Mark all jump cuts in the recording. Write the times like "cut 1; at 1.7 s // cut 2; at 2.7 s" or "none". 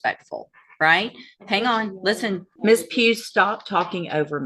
cut 1; at 2.5 s